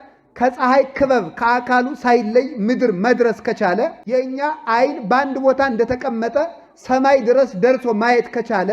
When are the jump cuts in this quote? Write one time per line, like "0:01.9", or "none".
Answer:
0:04.0